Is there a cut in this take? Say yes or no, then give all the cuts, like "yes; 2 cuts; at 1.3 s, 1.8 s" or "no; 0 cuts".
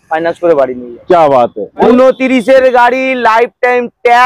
yes; 1 cut; at 1.8 s